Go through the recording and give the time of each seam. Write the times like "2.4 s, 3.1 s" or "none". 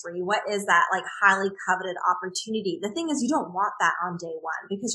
none